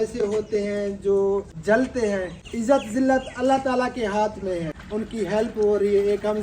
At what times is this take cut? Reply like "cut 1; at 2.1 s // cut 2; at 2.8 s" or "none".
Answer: cut 1; at 1.5 s // cut 2; at 2.4 s // cut 3; at 4.8 s